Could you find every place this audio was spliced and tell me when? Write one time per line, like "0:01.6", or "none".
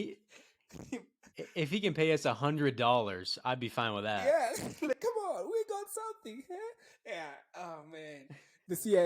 0:04.2